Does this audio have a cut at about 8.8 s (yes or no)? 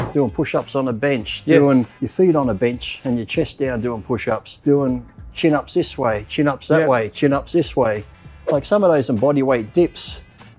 no